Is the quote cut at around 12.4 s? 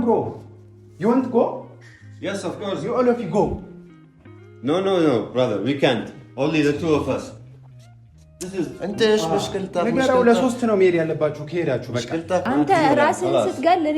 yes; 1 cut; at 12.4 s

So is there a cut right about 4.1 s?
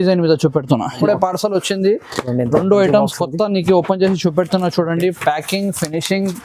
no; 1 cut; at 1.0 s

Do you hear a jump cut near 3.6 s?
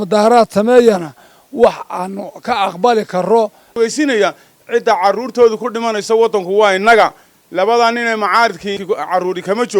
yes; 2 cuts; at 3.6 s, 8.8 s

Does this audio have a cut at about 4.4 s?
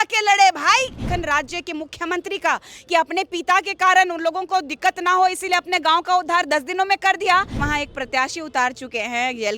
no; 2 cuts; at 1.1 s, 7.6 s

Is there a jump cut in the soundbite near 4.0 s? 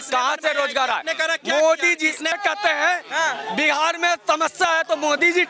no; 1 cut; at 2.3 s

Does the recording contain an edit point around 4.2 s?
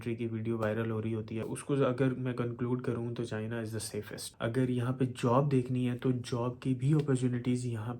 yes; 2 cuts; at 1.4 s, 4.2 s

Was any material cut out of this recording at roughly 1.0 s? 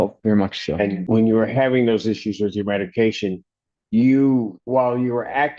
yes; 2 cuts; at 1.0 s, 4.6 s

